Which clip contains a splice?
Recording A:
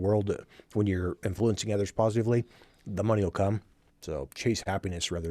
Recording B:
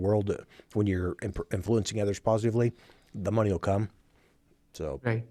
A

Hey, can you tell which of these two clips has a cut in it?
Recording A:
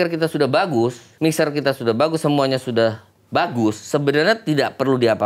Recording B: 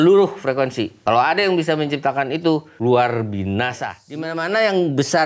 B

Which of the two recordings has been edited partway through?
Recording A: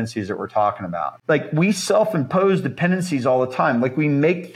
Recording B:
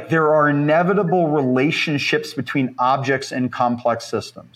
A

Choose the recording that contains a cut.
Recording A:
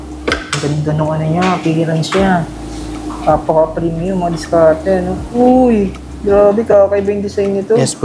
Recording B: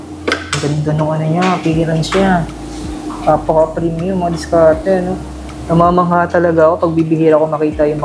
A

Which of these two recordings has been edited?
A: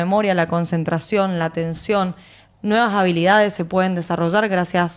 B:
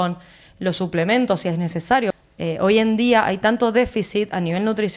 B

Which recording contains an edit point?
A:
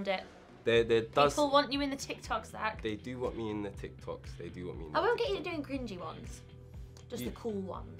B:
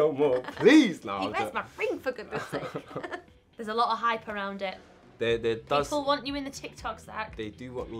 B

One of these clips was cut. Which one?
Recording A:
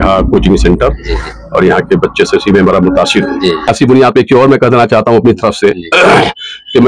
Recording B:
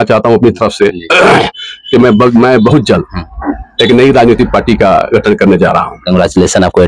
A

